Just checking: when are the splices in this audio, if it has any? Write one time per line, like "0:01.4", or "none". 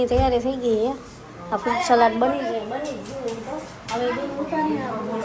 none